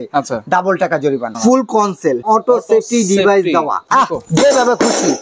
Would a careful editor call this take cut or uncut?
cut